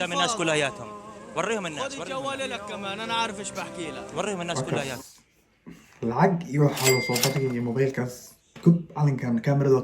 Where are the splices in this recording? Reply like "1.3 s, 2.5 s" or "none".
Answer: 4.7 s